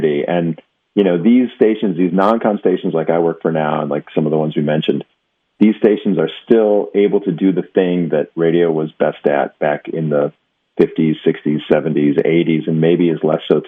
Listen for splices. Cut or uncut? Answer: uncut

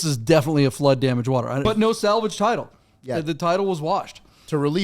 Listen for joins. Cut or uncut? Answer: cut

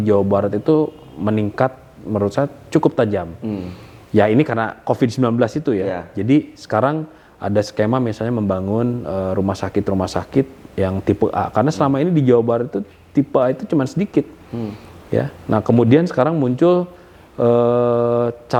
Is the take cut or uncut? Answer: uncut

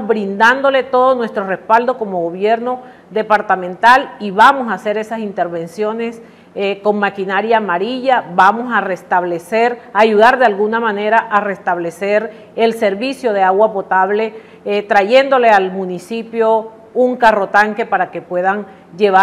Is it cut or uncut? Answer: uncut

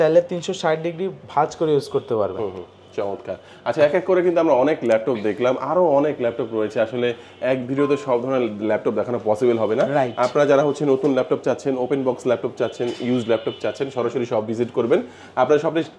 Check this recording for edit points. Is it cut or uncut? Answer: uncut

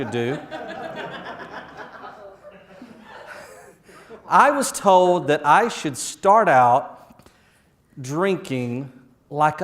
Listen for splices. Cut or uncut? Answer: cut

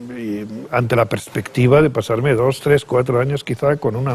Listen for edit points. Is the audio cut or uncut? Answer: cut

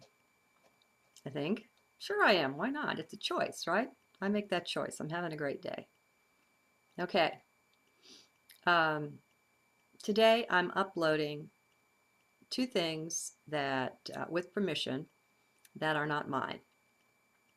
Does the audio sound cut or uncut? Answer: uncut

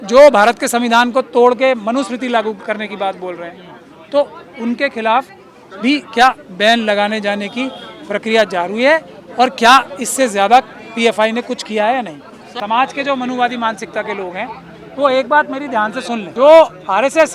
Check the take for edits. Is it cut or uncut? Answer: cut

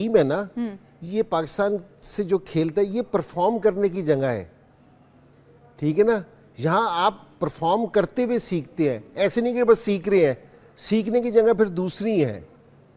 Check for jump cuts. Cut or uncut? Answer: uncut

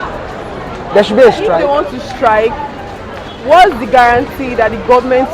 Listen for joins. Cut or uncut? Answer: cut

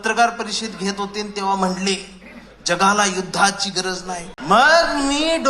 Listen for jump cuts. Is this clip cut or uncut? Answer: cut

